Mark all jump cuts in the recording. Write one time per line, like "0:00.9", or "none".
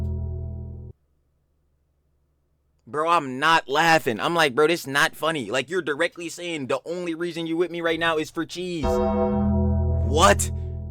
0:01.0